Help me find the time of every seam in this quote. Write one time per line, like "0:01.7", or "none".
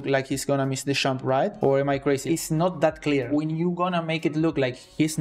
none